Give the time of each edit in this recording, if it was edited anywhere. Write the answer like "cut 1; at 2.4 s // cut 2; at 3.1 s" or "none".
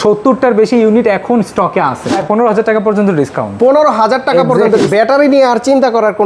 cut 1; at 2.1 s // cut 2; at 4.9 s